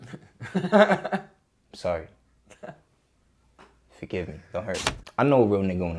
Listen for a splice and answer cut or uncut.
cut